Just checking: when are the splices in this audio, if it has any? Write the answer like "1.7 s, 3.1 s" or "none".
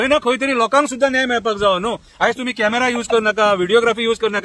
none